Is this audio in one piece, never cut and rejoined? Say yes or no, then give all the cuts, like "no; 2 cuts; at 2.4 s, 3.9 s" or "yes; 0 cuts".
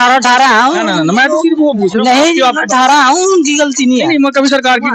yes; 0 cuts